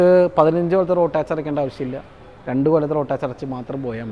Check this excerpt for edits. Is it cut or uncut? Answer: uncut